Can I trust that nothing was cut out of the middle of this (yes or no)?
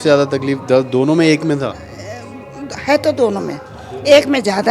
yes